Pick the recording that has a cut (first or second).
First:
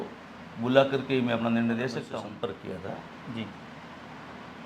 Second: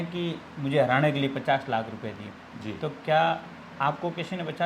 first